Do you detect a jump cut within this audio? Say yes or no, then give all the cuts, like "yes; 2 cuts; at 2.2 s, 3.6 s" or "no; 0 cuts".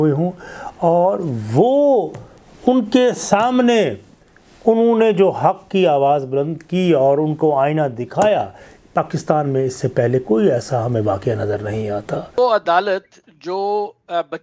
yes; 1 cut; at 12.3 s